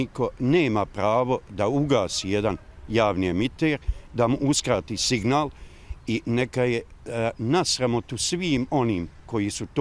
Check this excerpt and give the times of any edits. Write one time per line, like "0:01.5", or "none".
none